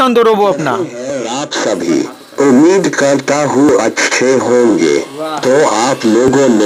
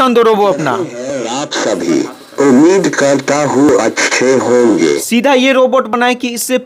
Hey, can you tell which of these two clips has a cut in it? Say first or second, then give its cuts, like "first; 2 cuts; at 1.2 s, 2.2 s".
second; 1 cut; at 5.0 s